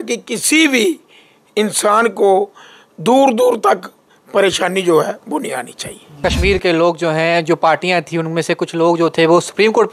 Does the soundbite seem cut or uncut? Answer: cut